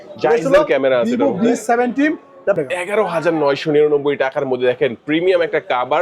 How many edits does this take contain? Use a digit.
1